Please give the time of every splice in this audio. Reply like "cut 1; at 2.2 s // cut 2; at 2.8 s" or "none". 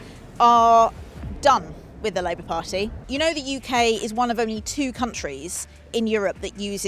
cut 1; at 3.0 s